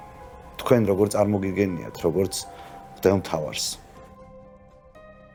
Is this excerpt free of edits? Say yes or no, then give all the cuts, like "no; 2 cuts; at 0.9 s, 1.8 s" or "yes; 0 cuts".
yes; 0 cuts